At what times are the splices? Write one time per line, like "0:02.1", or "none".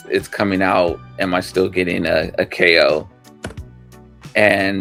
none